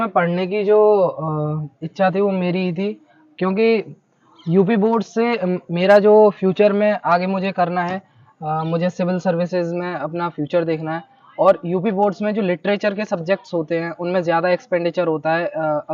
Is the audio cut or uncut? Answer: uncut